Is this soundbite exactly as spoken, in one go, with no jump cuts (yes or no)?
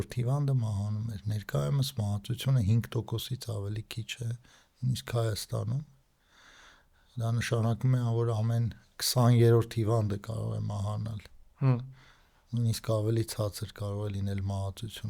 yes